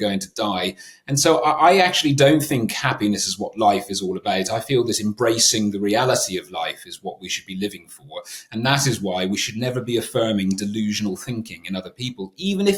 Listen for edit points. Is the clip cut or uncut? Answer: uncut